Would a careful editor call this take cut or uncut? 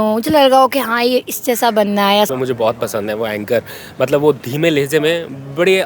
cut